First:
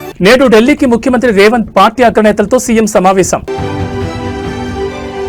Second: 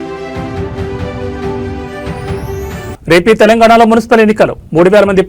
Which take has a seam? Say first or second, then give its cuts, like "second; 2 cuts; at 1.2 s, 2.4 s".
second; 1 cut; at 1.8 s